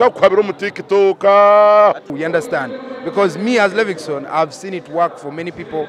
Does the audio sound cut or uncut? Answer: cut